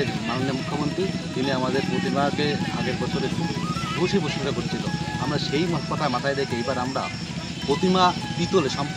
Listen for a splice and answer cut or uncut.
uncut